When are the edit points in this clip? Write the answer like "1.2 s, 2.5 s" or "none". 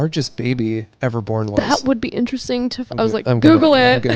none